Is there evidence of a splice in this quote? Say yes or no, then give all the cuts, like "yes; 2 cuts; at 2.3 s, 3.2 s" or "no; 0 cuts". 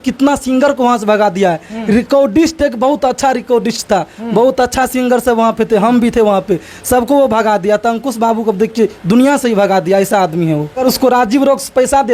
yes; 1 cut; at 10.8 s